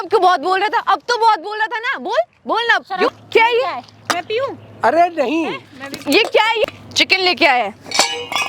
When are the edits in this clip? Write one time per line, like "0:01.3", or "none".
0:03.1
0:06.7

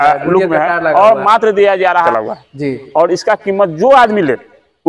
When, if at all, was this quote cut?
0:02.1

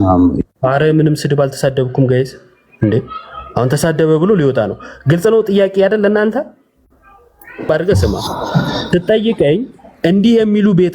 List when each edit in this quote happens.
0:07.7

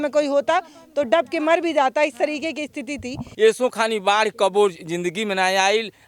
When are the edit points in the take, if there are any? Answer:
0:03.3

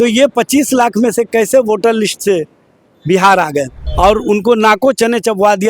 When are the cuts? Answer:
0:03.8

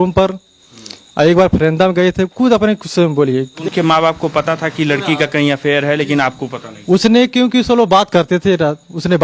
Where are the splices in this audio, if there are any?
0:03.5

